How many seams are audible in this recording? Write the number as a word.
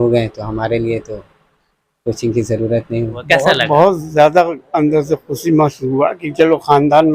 one